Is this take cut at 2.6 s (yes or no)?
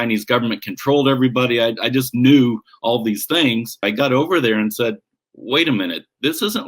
no